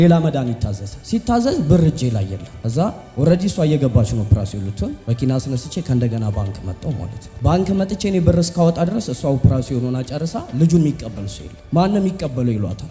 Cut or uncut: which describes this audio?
cut